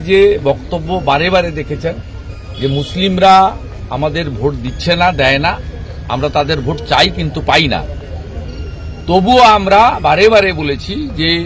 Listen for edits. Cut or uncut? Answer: uncut